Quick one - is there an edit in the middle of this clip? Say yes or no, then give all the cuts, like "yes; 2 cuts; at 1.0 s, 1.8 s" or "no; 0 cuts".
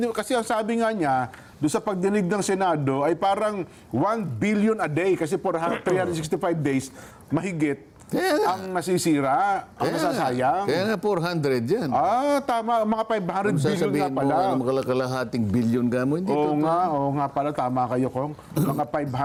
no; 0 cuts